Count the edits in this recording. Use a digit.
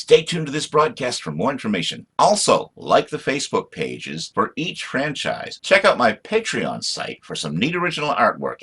1